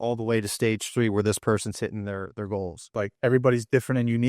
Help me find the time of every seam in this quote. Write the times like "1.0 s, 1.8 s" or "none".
3.1 s